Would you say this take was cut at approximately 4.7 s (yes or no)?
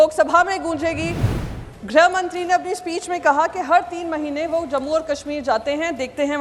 no